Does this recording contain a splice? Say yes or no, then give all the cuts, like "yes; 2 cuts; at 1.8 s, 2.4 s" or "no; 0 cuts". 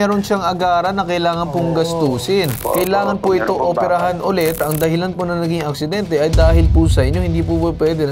yes; 2 cuts; at 2.6 s, 4.6 s